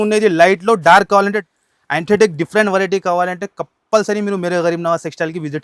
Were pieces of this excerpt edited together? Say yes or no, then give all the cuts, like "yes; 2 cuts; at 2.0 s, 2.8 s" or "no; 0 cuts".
yes; 1 cut; at 1.4 s